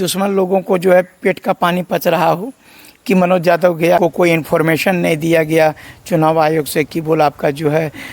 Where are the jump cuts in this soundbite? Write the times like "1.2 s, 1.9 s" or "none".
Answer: 4.0 s